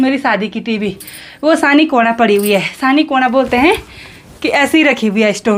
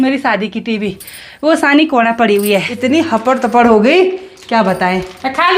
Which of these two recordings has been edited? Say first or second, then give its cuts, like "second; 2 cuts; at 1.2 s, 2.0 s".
second; 1 cut; at 2.7 s